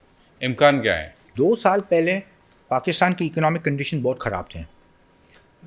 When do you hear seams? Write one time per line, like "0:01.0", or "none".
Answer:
0:01.3